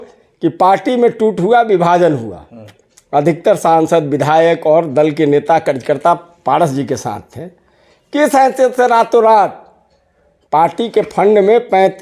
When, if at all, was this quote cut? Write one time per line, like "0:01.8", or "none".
none

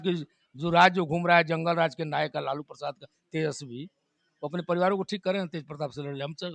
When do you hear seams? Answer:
none

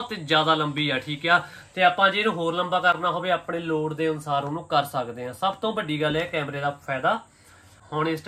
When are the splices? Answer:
none

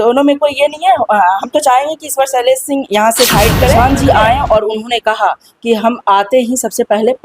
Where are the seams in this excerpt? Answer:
0:03.8

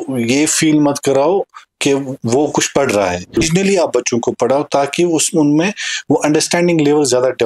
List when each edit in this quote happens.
0:03.4

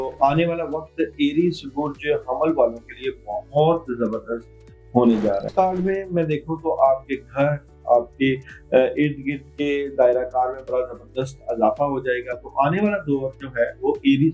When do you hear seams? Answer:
0:05.5

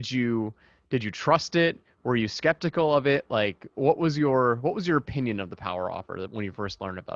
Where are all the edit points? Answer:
none

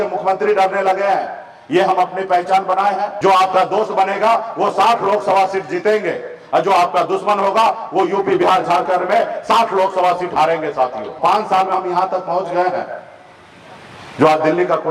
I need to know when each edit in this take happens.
0:03.1
0:11.2

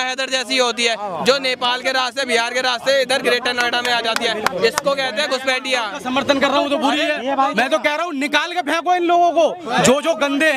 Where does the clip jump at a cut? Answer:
none

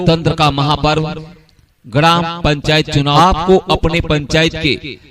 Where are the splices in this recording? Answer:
0:03.1

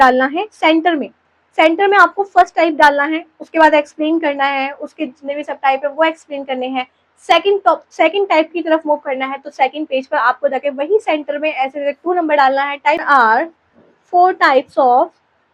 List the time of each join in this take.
0:13.0

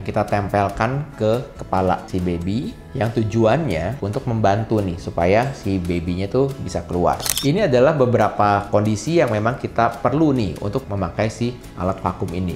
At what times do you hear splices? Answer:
0:07.3

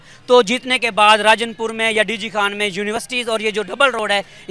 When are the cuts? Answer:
none

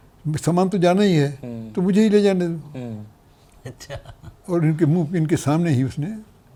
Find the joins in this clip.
none

